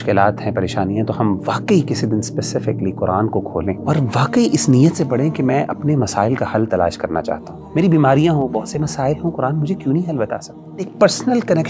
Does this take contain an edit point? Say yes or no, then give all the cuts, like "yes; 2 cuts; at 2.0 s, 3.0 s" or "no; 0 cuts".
yes; 3 cuts; at 3.8 s, 7.5 s, 10.9 s